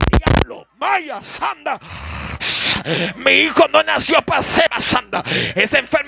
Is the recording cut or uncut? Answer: cut